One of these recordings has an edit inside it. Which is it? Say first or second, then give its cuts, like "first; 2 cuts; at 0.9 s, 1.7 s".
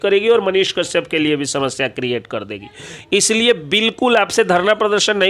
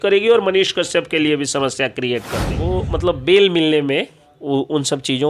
second; 1 cut; at 2.7 s